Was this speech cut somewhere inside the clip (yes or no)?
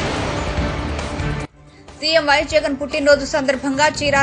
yes